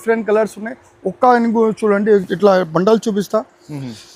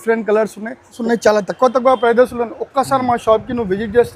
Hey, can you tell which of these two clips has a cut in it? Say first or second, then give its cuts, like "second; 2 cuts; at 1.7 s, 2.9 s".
second; 1 cut; at 1.0 s